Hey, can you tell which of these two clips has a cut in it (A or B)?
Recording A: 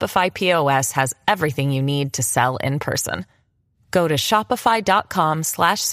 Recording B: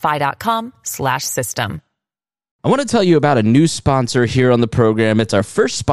B